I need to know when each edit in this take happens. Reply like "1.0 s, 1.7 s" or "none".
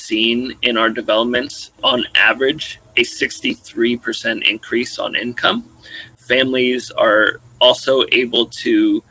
1.8 s, 6.2 s